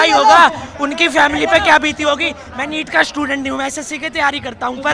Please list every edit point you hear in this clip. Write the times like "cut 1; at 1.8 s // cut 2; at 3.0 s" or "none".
none